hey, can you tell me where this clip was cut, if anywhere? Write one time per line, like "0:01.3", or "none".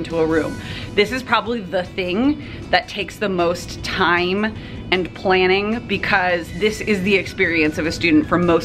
none